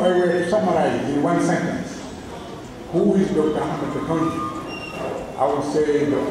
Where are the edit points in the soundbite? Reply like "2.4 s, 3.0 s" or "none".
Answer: none